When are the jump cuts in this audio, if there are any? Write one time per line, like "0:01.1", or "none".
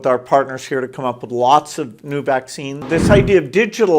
0:02.9